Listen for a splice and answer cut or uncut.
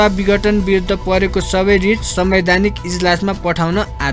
uncut